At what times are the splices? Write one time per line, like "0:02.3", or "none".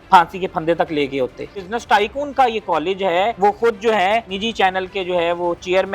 0:01.6
0:03.3
0:04.3